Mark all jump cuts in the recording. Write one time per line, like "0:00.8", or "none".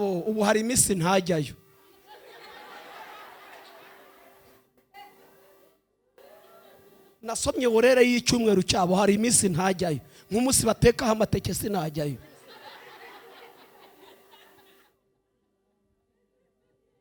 none